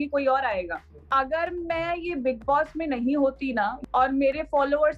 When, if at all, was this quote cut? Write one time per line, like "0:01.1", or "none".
0:00.9
0:03.8